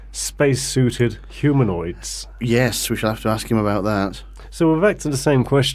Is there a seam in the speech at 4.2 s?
no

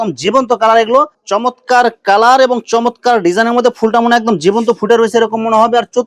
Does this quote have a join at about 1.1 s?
yes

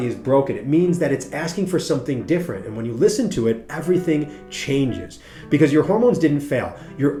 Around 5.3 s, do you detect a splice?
no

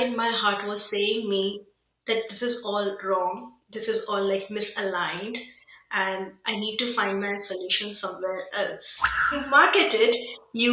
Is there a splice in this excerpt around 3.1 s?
no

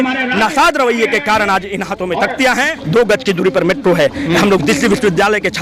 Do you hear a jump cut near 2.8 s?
yes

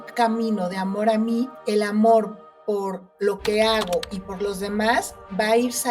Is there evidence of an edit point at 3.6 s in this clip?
no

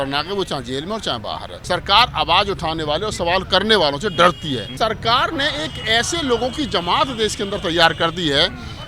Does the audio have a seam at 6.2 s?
no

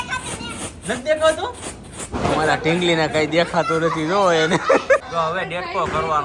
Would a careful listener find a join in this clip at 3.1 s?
no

